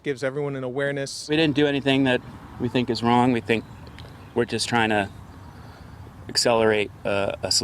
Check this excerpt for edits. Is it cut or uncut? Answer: cut